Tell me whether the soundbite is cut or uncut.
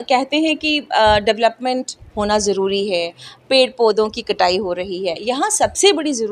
uncut